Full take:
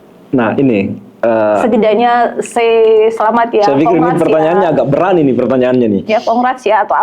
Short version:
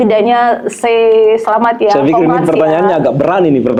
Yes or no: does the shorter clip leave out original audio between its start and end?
no